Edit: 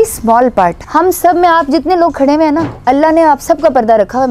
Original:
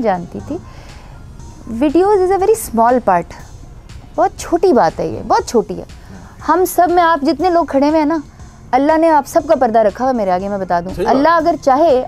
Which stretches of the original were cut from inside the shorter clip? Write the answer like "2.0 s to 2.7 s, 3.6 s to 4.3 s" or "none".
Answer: 3.3 s to 6.4 s, 8.3 s to 8.6 s

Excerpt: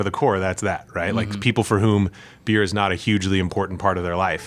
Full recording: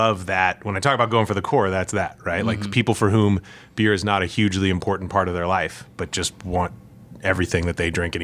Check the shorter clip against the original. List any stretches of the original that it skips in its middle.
none

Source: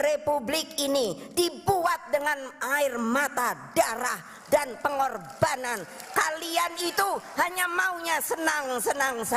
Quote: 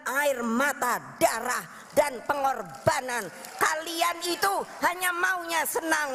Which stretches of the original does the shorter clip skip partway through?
none

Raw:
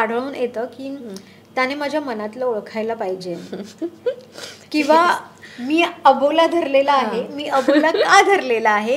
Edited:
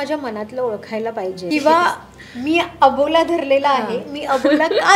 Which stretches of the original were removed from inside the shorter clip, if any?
3.3 s to 4.7 s

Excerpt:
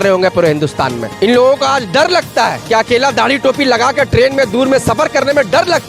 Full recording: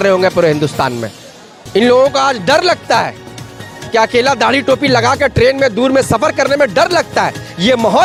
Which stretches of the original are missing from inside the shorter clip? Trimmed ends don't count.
1.0 s to 1.6 s, 3.1 s to 3.8 s

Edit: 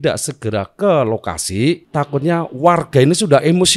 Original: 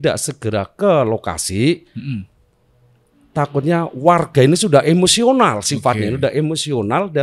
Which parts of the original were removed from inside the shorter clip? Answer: 1.8 s to 3.3 s

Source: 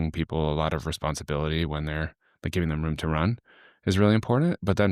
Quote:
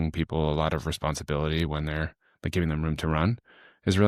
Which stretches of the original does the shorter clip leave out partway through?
none

